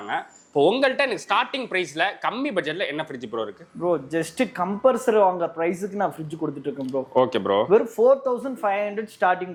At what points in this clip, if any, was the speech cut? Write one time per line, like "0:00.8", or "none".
none